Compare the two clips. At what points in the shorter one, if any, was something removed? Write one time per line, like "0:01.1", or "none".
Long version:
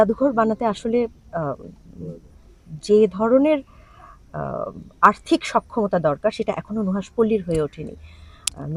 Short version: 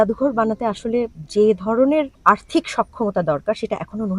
0:01.2
0:02.1

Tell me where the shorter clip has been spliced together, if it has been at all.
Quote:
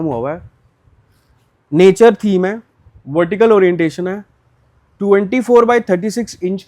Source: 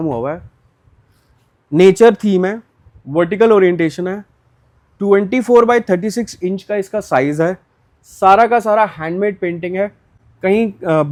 none

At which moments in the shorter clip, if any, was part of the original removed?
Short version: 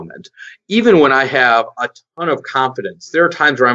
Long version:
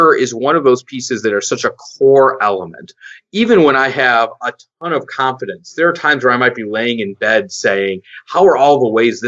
none

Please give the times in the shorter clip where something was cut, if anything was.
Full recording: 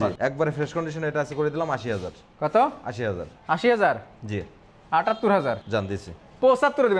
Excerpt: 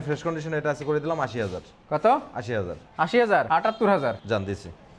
0:03.5

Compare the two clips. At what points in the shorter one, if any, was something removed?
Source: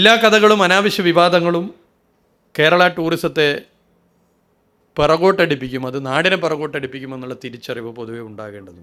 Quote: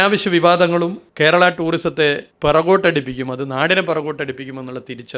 0:01.0
0:02.3

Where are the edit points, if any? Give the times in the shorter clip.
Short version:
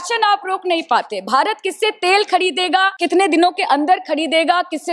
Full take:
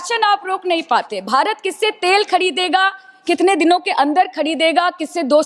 0:03.0

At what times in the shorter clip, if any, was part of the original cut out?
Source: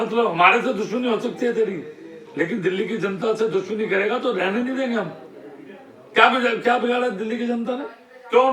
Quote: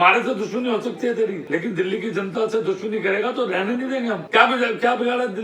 0:01.4
0:04.2

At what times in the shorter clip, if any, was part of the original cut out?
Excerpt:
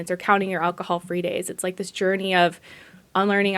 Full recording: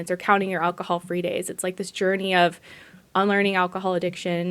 none

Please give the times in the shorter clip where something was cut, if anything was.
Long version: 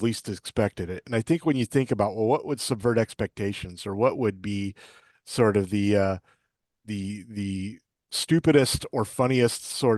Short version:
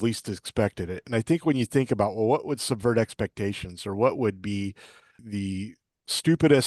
0:05.2

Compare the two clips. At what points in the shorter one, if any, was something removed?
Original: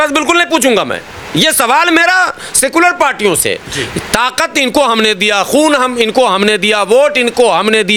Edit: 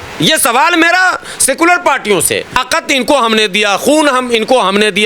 0:02.6

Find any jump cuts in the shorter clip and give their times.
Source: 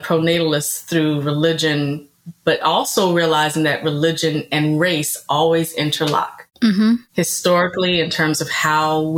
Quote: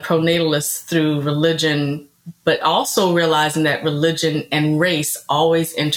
none

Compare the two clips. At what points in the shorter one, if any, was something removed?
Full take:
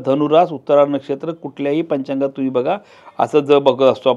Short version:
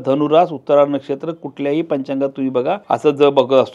0:02.8

